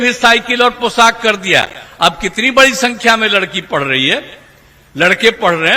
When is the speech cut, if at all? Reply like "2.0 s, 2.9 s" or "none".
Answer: none